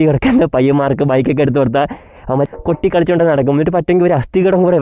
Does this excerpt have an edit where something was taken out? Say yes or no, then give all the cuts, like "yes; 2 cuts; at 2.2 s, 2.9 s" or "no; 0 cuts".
yes; 1 cut; at 2.4 s